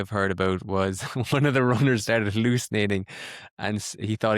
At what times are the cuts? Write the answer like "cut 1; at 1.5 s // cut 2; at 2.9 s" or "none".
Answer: none